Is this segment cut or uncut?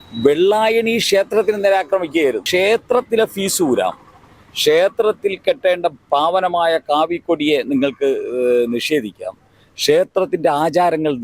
cut